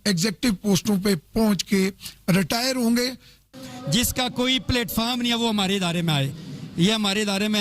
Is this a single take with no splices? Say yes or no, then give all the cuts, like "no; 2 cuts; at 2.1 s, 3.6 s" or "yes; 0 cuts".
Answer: no; 1 cut; at 3.4 s